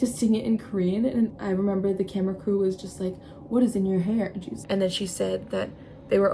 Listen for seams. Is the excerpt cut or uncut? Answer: cut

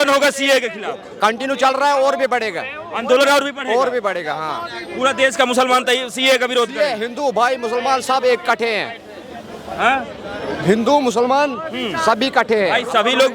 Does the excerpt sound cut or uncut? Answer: uncut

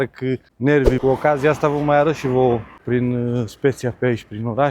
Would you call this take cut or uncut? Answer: cut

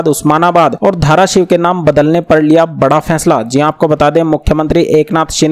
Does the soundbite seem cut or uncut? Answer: uncut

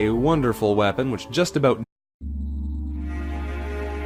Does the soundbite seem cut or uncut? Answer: uncut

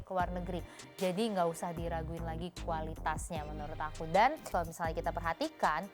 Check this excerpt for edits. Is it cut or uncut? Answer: cut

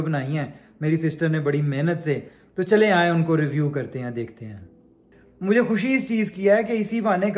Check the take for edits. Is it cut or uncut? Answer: cut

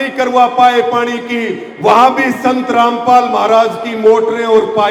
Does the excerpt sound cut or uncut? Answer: uncut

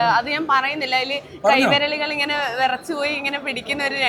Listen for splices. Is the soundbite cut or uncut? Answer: uncut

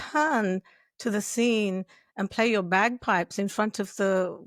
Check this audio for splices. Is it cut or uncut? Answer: uncut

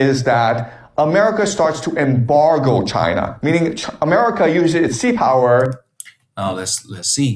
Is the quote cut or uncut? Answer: uncut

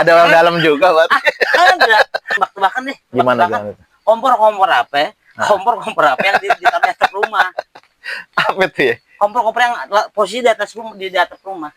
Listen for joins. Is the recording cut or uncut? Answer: cut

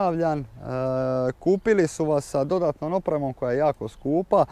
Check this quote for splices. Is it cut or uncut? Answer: uncut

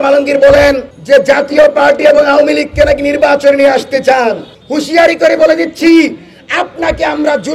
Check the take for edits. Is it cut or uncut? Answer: cut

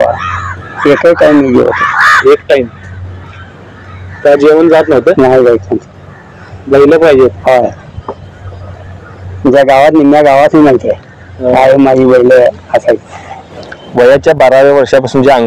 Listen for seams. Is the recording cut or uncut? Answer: uncut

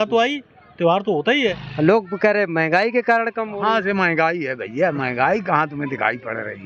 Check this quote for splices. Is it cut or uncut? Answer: cut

